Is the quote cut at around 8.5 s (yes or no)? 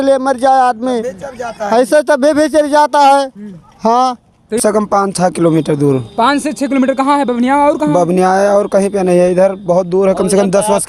no